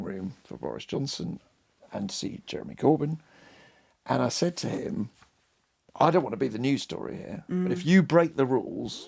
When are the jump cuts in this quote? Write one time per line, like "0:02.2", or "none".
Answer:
none